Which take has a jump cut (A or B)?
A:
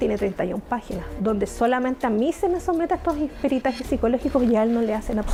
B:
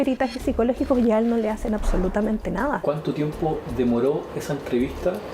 B